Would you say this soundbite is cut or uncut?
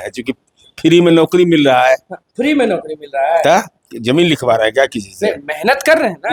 uncut